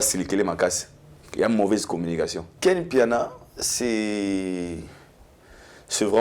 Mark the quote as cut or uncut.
cut